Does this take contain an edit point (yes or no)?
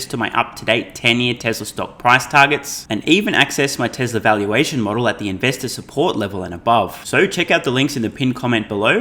no